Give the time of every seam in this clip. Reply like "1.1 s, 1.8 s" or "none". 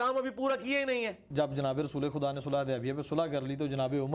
1.3 s